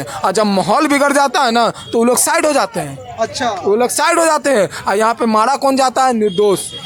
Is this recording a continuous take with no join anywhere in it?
yes; 0 cuts

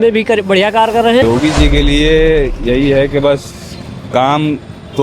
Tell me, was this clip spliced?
yes; 1 cut; at 1.2 s

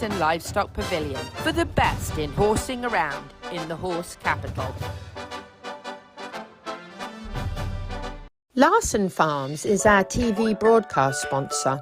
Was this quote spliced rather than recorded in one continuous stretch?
yes; 1 cut; at 8.3 s

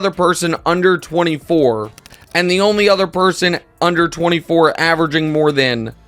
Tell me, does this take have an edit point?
no; 0 cuts

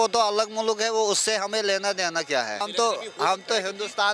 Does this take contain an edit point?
yes; 1 cut; at 2.6 s

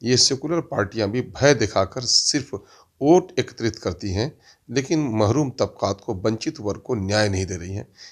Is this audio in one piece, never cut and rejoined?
yes; 0 cuts

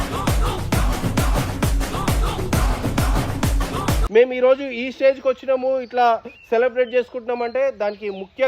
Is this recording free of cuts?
no; 1 cut; at 4.0 s

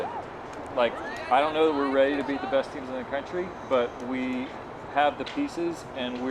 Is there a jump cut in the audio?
yes; 1 cut; at 1.1 s

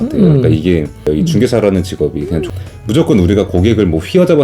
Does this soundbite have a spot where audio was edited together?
yes; 2 cuts; at 1.1 s, 2.4 s

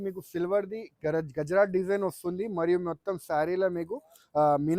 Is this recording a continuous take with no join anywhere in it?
yes; 0 cuts

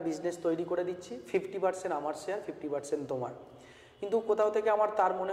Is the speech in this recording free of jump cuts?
yes; 0 cuts

